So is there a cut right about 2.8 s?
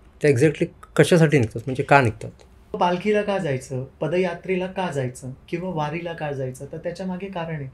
yes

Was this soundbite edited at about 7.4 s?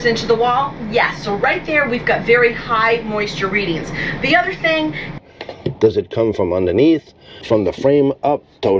yes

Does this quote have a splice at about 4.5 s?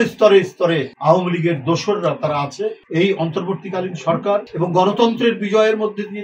yes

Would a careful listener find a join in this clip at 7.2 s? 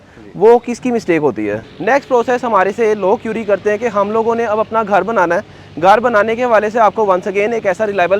no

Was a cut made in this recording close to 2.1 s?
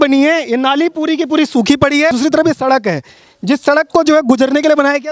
yes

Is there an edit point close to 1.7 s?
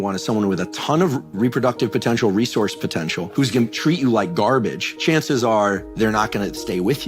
no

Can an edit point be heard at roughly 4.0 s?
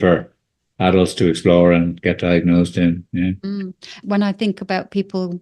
yes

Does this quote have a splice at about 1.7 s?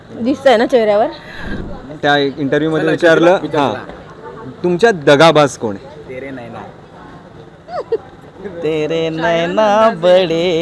yes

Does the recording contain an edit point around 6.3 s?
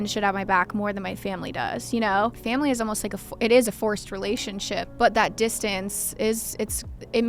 no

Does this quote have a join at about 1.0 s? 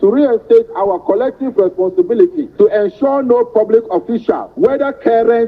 no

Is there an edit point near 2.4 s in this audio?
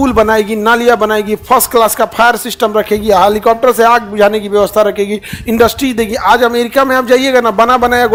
no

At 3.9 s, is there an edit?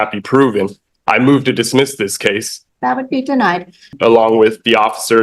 yes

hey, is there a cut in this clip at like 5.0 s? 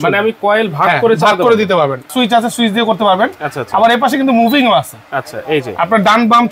no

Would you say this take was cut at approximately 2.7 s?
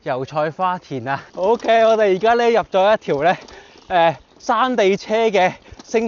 no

